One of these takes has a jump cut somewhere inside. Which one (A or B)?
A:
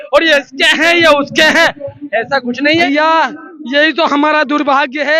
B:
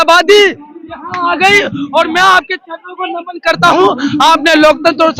A